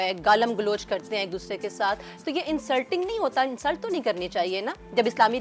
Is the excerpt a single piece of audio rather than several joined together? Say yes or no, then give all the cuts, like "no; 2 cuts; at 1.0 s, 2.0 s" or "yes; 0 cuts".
yes; 0 cuts